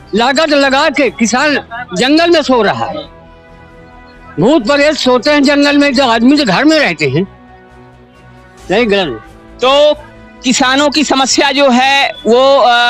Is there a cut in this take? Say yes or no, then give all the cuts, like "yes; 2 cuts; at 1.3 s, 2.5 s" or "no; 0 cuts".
no; 0 cuts